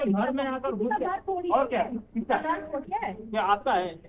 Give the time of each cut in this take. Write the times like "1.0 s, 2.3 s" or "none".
none

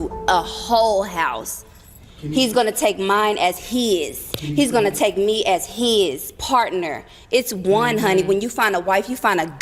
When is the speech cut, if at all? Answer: 8.2 s

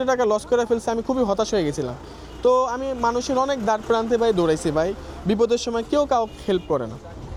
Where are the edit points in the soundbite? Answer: none

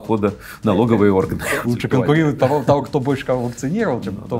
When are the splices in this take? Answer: 1.4 s

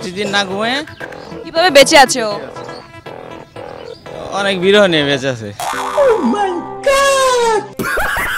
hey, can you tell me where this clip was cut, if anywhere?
none

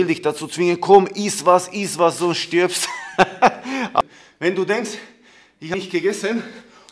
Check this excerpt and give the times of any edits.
4.0 s, 5.7 s

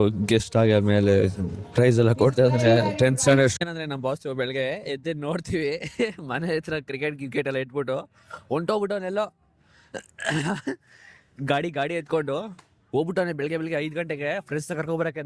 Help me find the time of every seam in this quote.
3.5 s

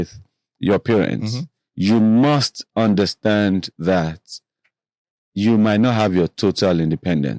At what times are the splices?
none

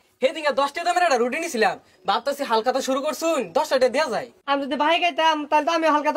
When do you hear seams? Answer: 4.3 s

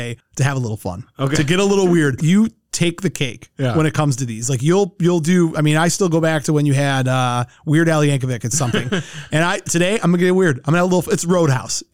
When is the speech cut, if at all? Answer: none

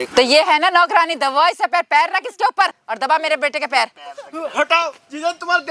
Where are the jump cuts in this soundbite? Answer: 2.8 s

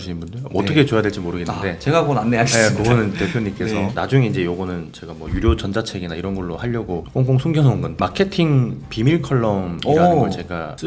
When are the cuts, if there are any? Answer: none

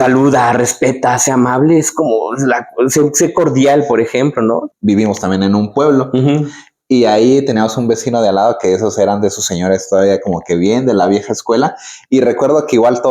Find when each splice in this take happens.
4.7 s

